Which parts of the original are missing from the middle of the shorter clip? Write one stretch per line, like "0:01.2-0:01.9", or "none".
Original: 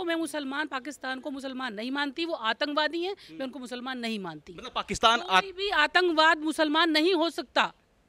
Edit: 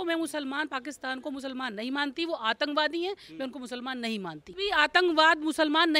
0:04.5-0:05.5